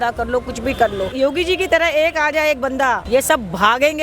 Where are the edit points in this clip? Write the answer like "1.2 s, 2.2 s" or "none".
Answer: 1.1 s, 3.0 s